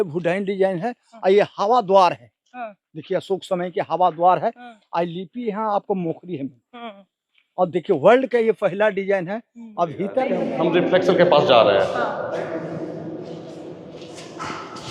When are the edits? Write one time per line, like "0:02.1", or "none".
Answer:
0:10.4